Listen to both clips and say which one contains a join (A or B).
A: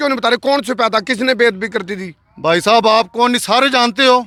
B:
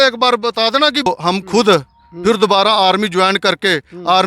B